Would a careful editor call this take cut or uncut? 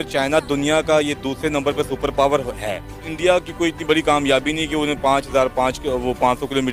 cut